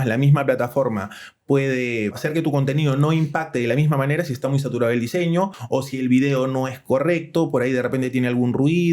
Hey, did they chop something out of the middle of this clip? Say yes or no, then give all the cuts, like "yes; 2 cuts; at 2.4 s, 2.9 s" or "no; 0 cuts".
yes; 2 cuts; at 2.2 s, 5.6 s